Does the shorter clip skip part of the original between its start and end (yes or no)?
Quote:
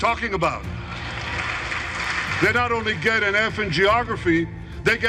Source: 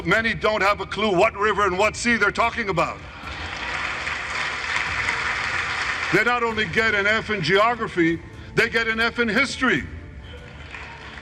yes